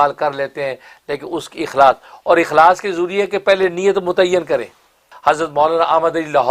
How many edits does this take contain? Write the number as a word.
one